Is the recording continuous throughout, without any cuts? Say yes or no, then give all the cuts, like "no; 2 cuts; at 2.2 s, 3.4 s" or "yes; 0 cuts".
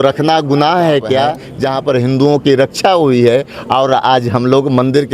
no; 1 cut; at 1.4 s